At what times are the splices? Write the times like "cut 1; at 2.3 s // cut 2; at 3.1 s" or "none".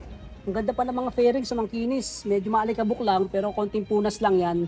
none